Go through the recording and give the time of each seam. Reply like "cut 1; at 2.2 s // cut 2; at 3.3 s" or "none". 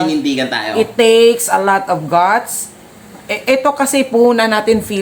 none